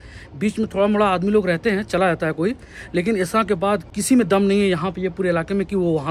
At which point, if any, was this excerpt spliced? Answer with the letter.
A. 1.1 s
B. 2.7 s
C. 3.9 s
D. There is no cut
C